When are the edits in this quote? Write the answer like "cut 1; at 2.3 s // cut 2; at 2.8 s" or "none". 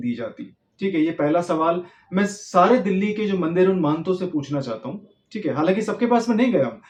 none